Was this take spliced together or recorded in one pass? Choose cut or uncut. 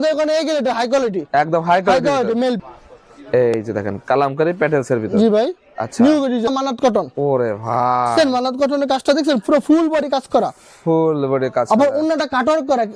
cut